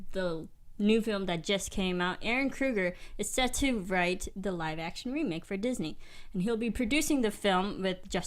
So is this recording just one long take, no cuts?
yes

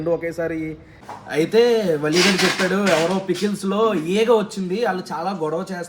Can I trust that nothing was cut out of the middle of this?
no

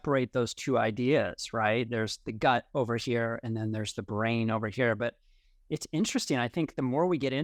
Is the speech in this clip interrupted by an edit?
no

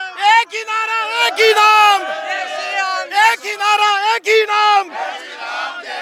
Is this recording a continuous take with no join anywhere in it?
yes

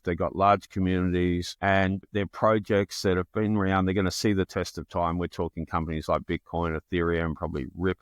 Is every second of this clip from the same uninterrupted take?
no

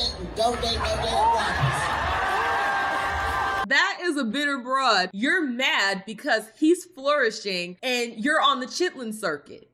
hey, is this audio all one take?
no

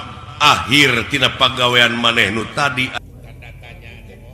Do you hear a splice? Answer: yes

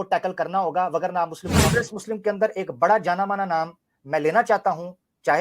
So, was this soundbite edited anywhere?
yes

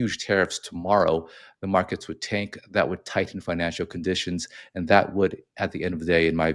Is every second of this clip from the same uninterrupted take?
yes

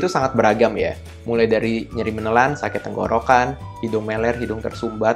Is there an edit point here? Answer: no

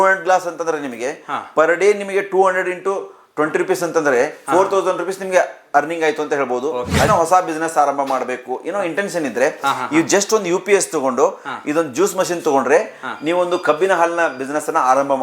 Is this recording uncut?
no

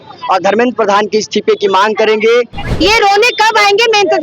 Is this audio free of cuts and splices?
no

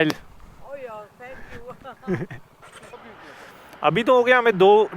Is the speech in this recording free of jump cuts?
no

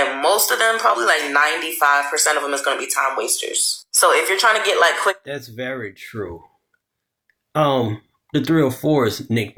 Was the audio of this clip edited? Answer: no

